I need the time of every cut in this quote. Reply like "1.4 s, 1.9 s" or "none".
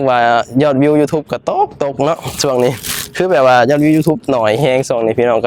none